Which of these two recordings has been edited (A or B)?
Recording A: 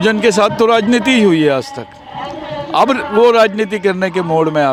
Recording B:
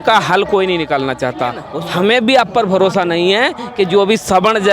B